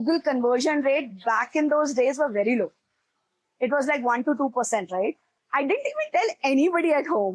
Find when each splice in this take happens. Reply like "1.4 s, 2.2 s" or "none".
5.3 s